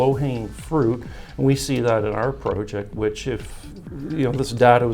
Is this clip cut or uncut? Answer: uncut